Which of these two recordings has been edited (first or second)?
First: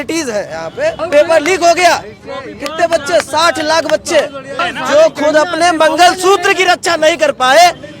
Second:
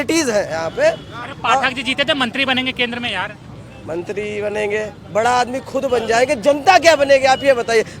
first